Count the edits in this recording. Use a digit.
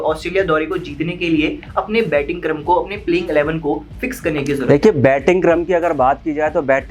0